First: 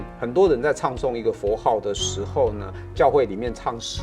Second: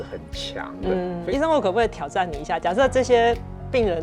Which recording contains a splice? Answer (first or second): second